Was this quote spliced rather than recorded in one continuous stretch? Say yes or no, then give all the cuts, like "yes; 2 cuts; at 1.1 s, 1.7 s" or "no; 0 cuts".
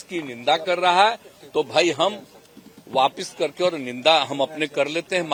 no; 0 cuts